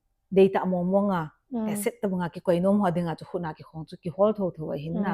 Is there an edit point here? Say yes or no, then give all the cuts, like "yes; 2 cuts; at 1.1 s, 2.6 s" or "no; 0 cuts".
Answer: no; 0 cuts